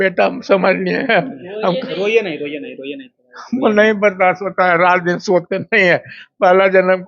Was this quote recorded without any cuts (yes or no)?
yes